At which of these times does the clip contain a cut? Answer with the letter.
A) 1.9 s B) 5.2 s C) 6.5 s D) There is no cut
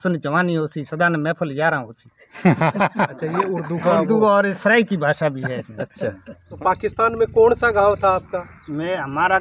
C